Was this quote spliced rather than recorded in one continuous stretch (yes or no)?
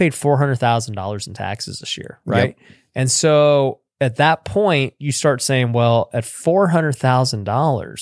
no